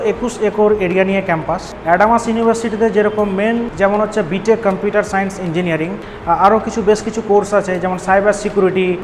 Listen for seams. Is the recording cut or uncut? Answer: cut